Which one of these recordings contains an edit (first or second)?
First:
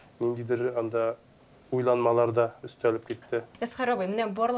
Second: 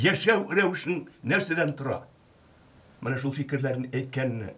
first